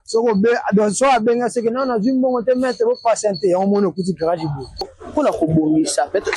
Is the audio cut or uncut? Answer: cut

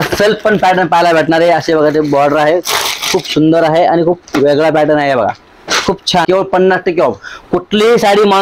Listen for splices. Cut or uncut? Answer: cut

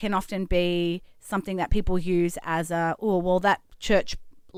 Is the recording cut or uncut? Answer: uncut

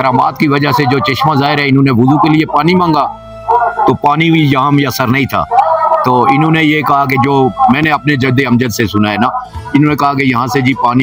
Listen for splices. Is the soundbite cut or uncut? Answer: uncut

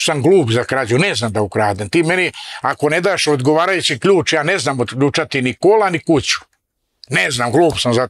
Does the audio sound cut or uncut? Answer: uncut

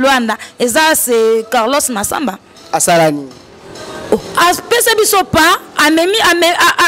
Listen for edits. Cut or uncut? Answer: uncut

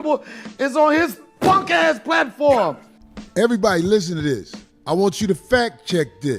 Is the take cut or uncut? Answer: cut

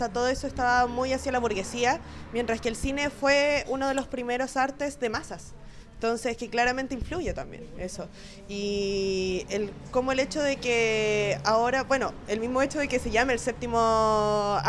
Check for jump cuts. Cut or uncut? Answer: uncut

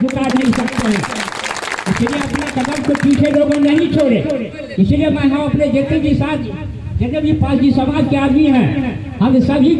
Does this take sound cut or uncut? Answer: uncut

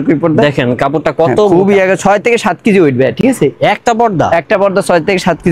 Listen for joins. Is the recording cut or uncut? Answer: uncut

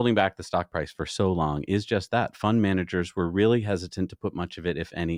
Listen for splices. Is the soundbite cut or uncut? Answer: uncut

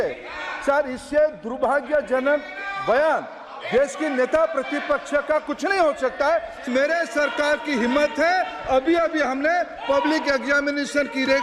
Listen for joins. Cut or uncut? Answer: cut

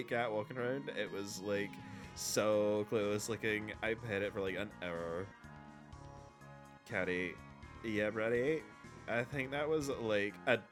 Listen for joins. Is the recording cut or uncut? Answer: uncut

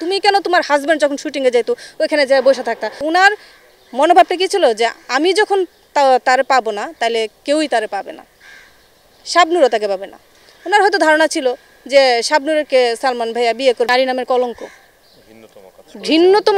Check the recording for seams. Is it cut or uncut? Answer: cut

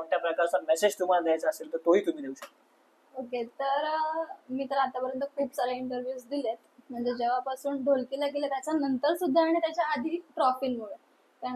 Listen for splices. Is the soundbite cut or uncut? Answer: uncut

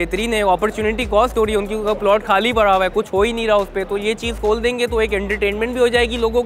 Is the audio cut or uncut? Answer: uncut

